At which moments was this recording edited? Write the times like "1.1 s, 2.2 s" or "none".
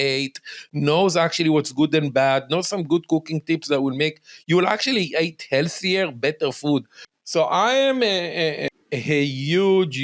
7.0 s, 8.6 s